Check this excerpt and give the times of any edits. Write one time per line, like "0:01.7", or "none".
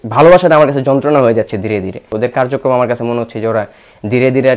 0:02.0